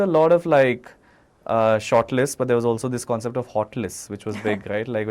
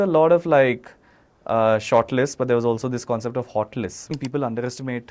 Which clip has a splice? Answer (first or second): second